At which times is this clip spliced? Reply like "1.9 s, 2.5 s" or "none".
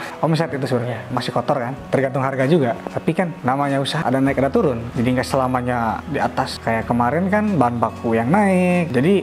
1.1 s, 4.8 s, 6.5 s

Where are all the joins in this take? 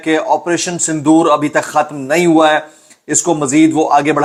none

